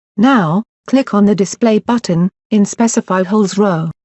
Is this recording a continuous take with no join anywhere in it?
no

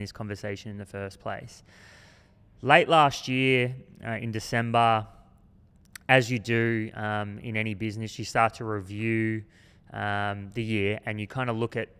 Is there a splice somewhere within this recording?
no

